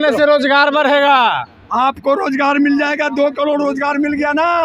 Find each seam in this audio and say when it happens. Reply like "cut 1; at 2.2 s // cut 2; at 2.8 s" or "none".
none